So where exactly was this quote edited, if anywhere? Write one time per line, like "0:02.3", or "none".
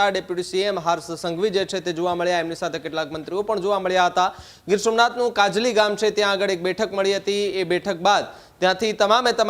none